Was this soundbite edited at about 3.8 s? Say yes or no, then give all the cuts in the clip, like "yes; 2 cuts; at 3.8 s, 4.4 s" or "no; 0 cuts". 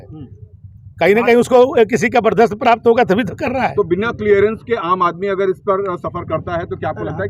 no; 0 cuts